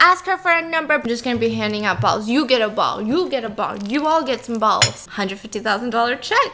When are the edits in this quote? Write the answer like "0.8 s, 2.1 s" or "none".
1.0 s, 5.0 s